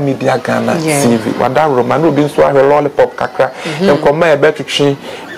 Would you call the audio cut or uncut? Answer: uncut